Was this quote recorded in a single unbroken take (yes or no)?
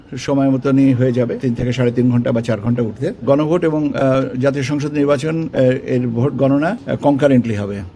no